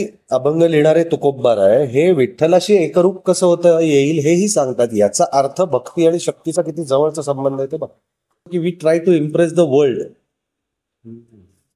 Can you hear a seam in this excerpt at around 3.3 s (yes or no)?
no